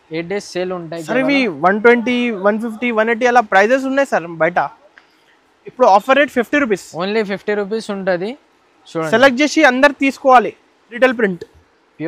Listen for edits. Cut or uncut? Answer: cut